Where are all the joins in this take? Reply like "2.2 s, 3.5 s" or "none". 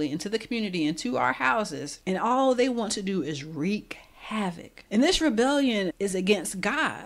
1.9 s, 4.7 s